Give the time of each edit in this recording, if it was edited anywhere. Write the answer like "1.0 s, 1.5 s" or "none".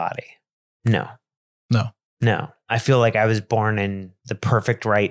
2.6 s